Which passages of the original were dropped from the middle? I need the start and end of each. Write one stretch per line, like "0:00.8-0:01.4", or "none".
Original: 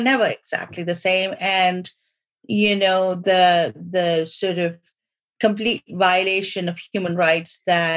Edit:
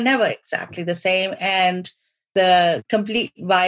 0:02.3-0:03.2
0:03.7-0:05.3